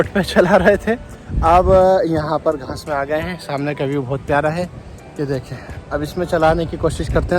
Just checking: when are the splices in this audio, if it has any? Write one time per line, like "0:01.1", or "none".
none